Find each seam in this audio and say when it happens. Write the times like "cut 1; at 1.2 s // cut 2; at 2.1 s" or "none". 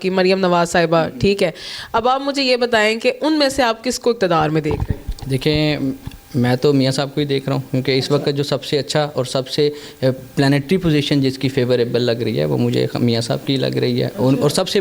none